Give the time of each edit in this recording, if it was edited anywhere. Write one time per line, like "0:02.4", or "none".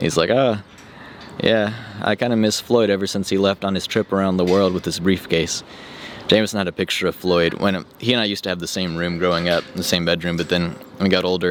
none

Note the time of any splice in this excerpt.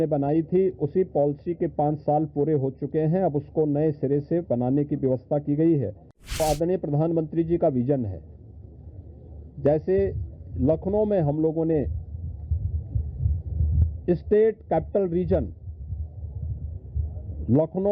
0:06.4

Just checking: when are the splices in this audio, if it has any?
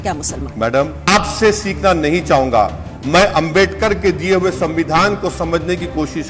0:01.0

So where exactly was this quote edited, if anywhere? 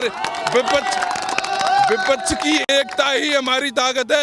none

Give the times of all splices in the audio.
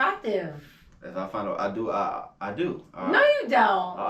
none

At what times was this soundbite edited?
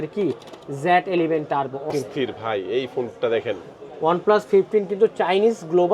0:01.9

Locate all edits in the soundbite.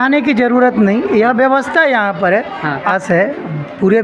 0:02.9

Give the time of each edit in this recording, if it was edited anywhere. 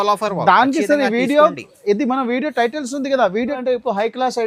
0:03.6

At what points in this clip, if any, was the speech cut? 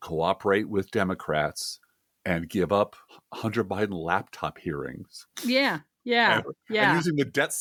none

